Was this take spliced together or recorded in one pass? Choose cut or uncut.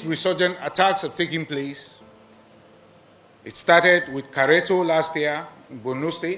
uncut